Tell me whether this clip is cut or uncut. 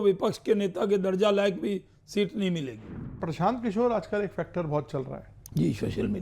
cut